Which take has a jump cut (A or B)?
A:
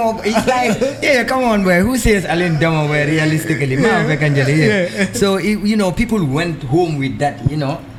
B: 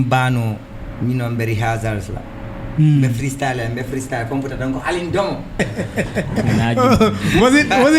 B